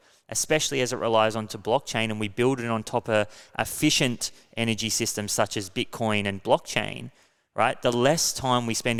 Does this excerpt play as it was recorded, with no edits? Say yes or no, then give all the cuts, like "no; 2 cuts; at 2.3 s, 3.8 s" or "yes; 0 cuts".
yes; 0 cuts